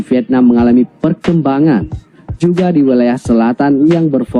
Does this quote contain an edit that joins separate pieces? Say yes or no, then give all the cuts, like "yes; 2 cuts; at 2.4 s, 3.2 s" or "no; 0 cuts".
no; 0 cuts